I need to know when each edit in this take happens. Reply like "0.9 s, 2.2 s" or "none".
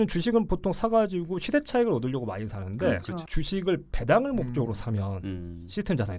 none